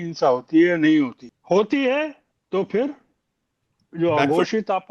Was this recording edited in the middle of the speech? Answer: yes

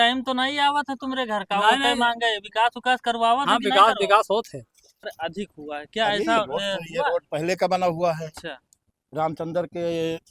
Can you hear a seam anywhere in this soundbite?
yes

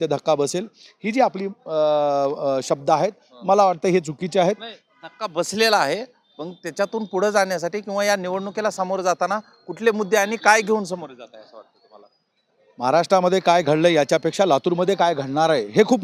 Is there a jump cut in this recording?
no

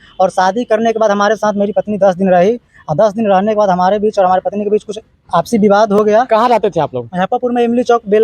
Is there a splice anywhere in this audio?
no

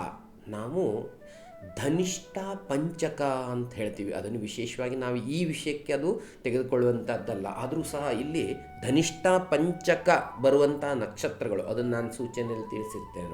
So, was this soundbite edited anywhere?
no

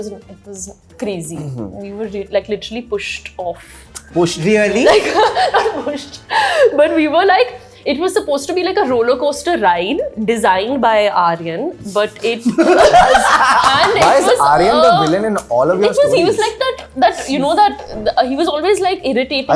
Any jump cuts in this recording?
no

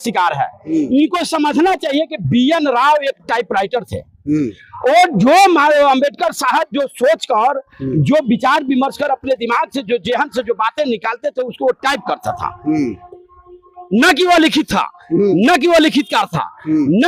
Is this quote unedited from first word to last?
yes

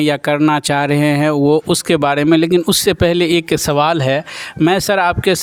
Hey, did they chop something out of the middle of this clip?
no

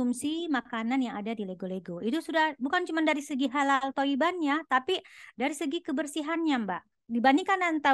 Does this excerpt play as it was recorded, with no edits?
no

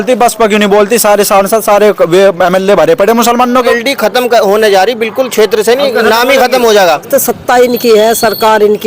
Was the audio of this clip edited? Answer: yes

